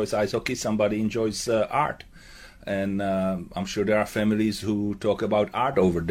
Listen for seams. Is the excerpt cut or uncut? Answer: uncut